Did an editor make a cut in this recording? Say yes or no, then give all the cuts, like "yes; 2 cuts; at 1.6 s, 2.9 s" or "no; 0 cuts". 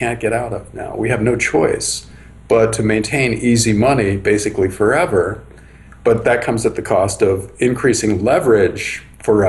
no; 0 cuts